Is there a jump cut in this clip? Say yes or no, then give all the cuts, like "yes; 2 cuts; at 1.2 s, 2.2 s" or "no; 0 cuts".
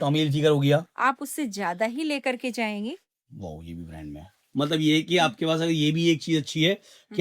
yes; 2 cuts; at 0.9 s, 4.4 s